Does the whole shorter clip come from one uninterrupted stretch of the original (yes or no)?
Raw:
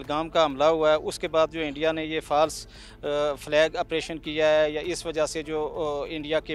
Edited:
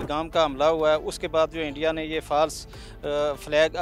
yes